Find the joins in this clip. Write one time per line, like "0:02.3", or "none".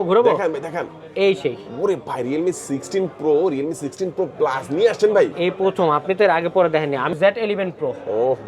0:07.2